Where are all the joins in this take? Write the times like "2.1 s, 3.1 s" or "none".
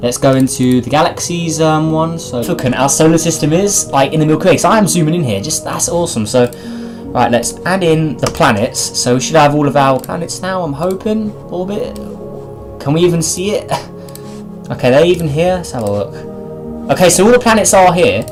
none